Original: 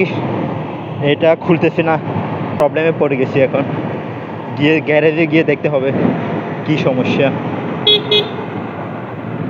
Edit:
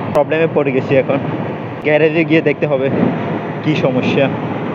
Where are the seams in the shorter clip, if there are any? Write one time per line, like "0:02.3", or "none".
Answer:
0:01.8